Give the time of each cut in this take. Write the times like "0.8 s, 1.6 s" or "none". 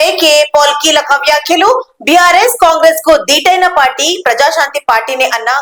none